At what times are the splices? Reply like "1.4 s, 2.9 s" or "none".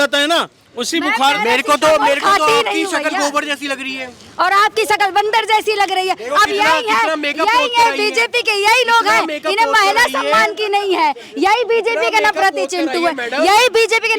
none